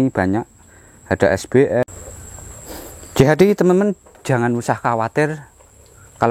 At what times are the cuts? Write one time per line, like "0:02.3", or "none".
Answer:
0:01.8